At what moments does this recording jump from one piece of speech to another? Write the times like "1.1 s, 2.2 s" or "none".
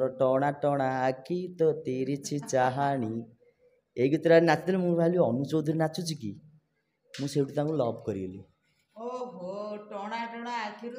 none